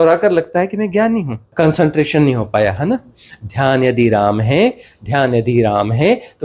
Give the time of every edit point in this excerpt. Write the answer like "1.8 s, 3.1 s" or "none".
1.4 s